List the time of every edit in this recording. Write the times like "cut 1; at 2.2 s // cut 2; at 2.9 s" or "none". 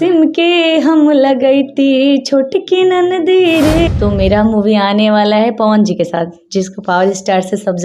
cut 1; at 3.9 s